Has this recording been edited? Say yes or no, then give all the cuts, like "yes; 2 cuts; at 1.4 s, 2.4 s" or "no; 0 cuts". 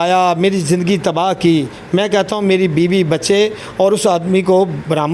no; 0 cuts